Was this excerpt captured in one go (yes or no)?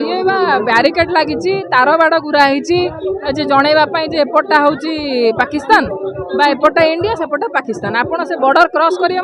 yes